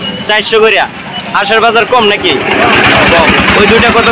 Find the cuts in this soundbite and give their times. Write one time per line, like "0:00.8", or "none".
none